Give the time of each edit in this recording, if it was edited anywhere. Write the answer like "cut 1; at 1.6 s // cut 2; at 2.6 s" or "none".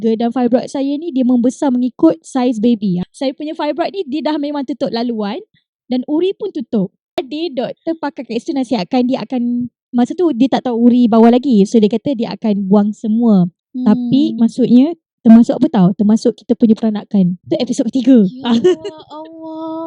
cut 1; at 3.0 s // cut 2; at 7.2 s